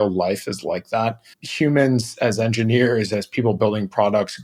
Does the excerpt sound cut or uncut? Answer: uncut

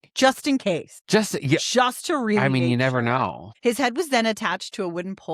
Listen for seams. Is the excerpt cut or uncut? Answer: cut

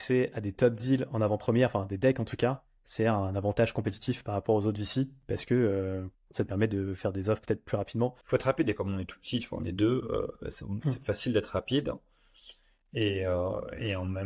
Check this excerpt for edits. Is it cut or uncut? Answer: cut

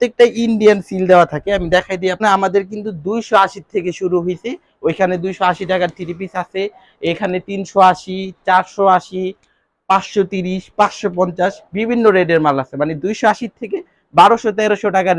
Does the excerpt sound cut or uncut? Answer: cut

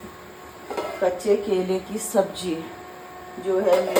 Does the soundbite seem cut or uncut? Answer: uncut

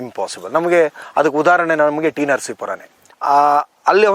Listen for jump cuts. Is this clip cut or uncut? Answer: cut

